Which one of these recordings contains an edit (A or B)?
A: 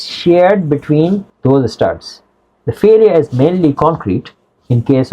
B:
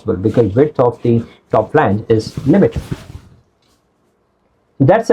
A